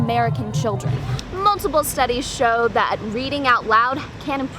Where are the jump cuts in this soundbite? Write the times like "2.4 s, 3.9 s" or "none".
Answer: 1.1 s